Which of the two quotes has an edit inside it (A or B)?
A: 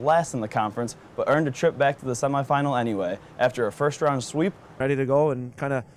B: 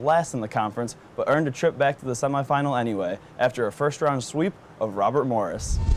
B